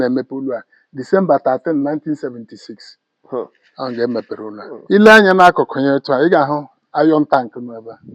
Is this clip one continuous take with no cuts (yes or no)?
no